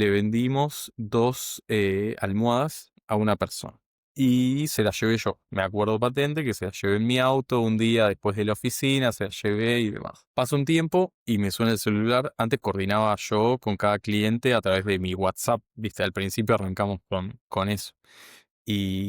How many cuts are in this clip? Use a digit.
1